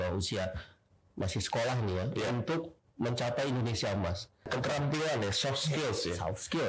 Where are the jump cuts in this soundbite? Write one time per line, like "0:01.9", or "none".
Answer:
0:04.5